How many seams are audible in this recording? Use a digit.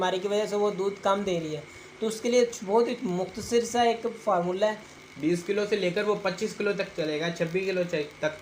1